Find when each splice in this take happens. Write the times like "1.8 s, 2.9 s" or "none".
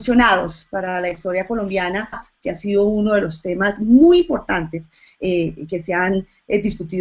none